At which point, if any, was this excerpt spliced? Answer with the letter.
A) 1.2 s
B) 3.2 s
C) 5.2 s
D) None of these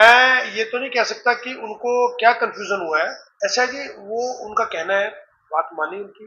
B